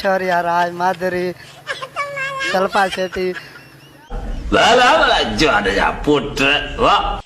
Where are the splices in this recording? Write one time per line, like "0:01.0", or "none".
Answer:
none